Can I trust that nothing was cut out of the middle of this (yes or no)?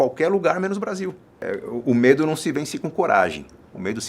no